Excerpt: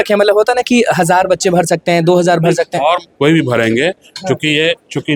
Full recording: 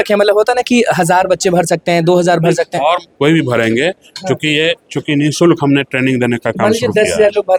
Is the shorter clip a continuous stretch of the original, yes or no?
yes